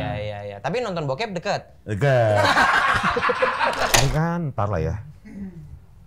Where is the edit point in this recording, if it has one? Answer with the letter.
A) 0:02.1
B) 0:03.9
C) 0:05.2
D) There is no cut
B